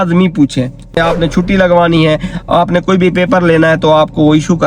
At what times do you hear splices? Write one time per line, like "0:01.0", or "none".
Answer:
0:01.0